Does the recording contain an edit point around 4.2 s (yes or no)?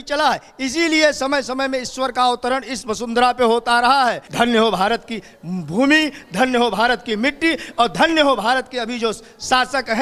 yes